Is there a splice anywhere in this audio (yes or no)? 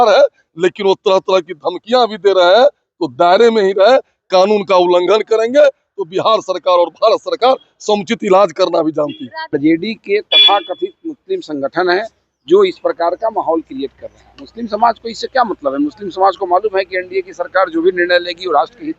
yes